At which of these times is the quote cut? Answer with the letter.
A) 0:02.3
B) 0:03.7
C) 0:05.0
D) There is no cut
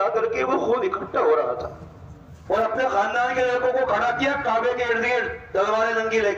A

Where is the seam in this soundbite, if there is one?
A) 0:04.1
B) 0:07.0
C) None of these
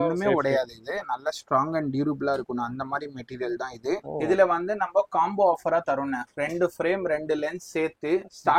A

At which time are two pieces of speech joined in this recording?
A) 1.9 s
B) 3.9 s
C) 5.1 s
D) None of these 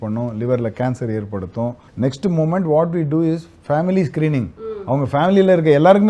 A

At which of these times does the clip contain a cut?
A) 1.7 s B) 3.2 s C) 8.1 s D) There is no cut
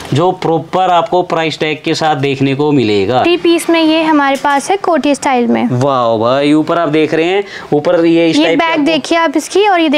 B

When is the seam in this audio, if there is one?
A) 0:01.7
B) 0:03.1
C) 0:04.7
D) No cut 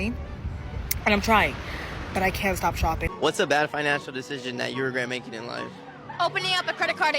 B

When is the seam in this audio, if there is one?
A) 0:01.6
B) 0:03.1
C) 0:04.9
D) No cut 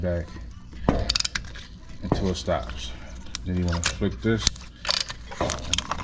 D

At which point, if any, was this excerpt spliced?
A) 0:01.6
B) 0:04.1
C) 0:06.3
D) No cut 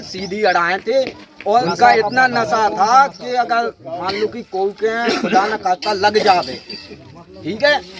A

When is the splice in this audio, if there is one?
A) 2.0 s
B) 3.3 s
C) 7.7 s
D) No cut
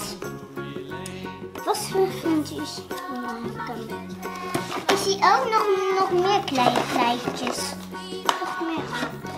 A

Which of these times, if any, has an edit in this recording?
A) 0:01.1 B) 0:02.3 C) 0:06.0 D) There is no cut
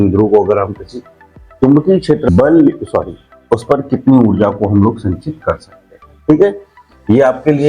B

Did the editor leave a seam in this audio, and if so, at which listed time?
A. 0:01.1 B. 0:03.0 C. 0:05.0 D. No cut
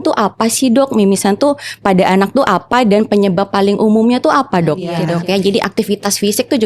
C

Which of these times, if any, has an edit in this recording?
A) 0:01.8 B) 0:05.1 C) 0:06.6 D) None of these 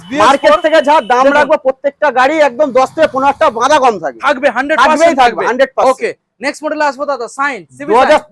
D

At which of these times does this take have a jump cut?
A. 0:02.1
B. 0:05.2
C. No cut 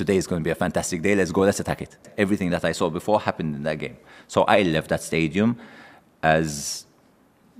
A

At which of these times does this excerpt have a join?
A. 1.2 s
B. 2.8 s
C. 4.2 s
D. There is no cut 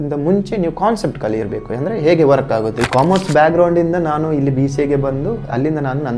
B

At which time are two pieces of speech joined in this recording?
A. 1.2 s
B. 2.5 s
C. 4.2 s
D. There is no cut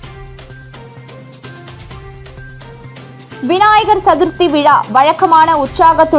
A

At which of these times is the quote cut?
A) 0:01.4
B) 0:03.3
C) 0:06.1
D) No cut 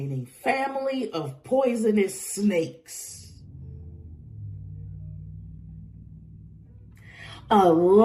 B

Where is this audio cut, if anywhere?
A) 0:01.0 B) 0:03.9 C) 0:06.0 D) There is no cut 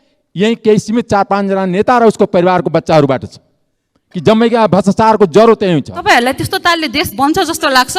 C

